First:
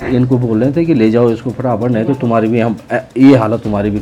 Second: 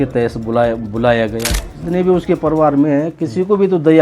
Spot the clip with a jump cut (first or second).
second